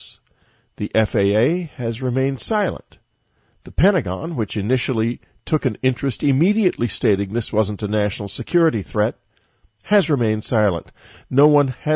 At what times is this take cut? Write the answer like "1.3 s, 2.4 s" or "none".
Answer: 8.6 s